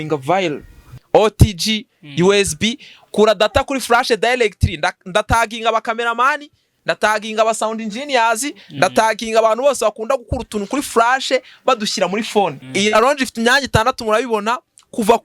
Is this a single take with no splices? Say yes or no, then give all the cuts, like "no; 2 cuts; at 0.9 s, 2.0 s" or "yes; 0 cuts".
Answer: no; 2 cuts; at 0.9 s, 12.6 s